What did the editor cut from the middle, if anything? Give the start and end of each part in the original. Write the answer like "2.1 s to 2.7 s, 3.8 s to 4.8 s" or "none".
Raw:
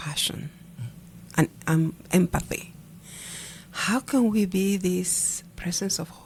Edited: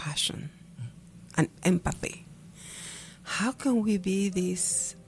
1.5 s to 2.0 s